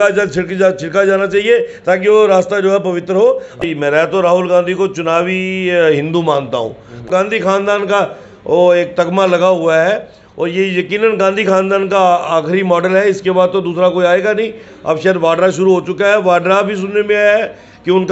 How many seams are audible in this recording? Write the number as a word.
two